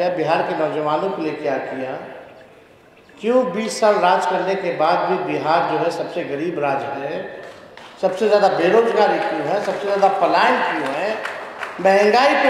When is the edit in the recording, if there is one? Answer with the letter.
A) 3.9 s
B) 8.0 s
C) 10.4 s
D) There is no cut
D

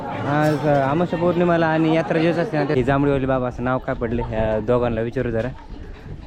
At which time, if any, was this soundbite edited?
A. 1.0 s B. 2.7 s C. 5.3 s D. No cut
B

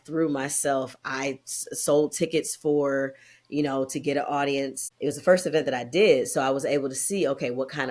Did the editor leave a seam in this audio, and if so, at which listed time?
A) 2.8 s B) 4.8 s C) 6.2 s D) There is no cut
B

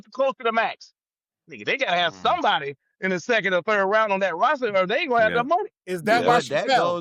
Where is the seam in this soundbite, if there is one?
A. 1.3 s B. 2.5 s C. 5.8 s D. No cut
D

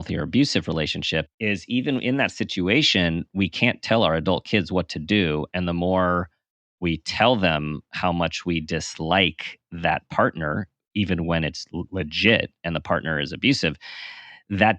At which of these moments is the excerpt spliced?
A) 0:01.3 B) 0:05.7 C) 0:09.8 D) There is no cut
A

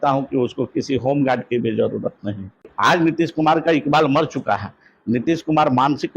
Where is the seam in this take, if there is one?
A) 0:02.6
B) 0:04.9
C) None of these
A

